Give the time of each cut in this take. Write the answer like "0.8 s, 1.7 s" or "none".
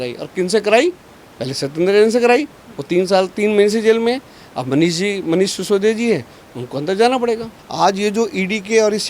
7.6 s